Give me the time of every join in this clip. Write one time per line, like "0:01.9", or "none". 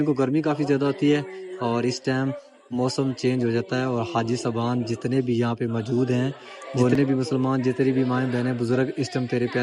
0:06.9